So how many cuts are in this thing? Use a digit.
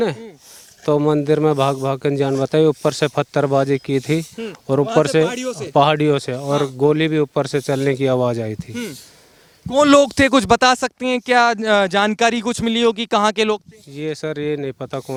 0